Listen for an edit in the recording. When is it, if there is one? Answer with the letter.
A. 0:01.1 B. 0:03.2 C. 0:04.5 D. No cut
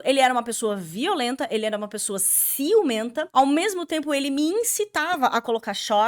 B